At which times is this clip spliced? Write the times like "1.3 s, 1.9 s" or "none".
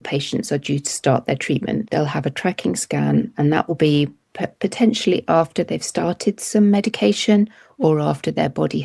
1.9 s